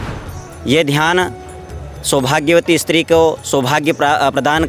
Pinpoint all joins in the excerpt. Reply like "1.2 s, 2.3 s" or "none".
none